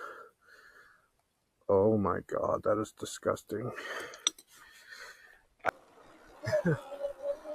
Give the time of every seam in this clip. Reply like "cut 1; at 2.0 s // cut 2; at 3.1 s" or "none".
cut 1; at 5.7 s

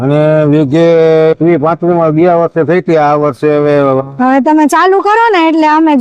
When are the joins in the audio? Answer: cut 1; at 1.4 s // cut 2; at 4.0 s

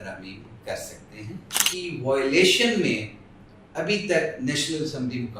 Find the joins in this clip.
cut 1; at 1.6 s

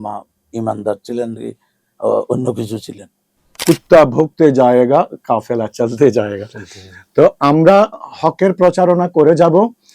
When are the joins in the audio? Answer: cut 1; at 3.5 s

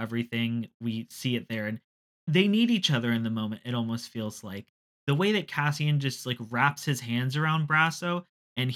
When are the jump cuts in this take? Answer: cut 1; at 2.0 s // cut 2; at 4.9 s

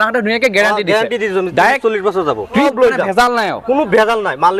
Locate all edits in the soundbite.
cut 1; at 2.6 s

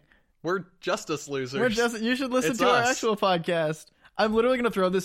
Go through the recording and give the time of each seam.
none

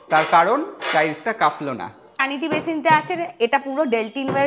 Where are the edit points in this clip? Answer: cut 1; at 2.2 s

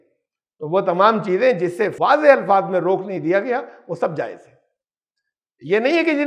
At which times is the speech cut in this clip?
cut 1; at 1.9 s

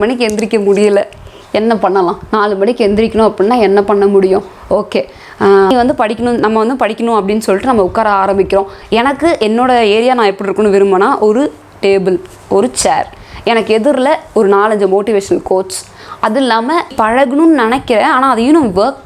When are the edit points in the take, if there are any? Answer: cut 1; at 5.7 s // cut 2; at 16.9 s

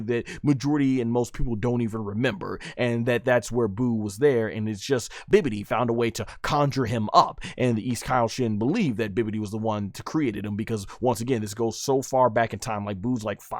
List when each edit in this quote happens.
cut 1; at 5.2 s

